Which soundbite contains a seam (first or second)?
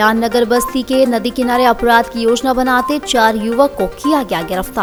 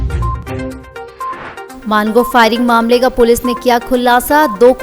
second